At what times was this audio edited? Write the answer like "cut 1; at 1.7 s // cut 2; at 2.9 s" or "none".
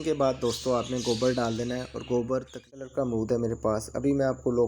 cut 1; at 2.8 s